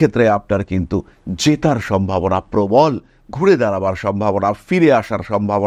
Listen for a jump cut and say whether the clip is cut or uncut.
uncut